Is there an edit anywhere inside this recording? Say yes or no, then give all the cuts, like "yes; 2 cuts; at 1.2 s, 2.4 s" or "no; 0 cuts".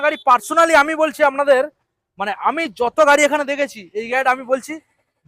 no; 0 cuts